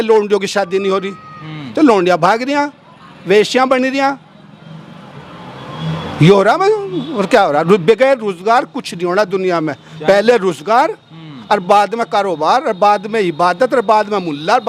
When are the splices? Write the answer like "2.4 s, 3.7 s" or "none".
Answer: none